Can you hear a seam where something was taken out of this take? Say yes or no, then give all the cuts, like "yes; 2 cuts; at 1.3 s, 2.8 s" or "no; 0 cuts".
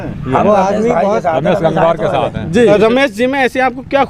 yes; 1 cut; at 2.7 s